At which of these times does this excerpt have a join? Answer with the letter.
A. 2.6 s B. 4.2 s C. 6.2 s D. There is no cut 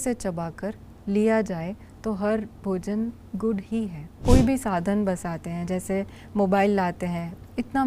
B